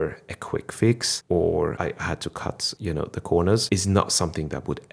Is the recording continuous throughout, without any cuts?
no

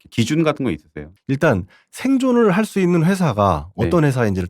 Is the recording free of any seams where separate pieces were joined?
no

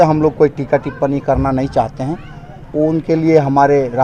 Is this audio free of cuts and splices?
yes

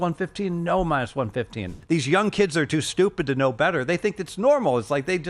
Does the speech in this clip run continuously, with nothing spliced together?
no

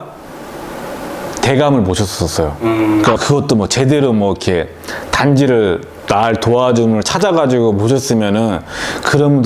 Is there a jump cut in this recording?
yes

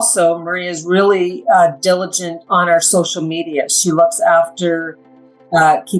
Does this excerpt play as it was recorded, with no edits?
yes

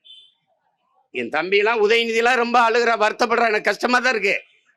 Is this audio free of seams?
yes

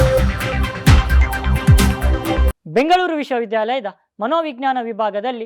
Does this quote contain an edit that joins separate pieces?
no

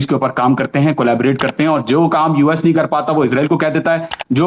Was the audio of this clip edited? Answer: no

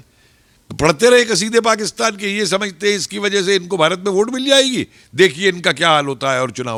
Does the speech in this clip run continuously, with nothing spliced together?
yes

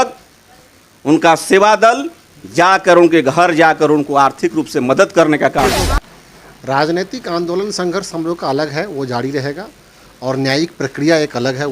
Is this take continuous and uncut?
no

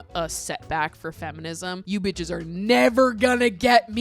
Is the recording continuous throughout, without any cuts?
no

